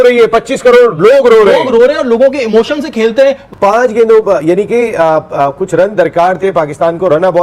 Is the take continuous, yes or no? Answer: no